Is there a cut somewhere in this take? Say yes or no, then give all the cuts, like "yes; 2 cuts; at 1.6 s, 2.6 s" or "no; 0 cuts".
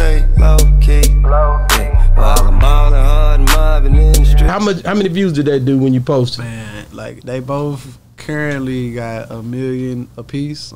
yes; 1 cut; at 4.5 s